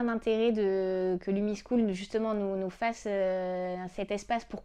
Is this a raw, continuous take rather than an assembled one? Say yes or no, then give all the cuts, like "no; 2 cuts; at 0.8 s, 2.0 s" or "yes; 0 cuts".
yes; 0 cuts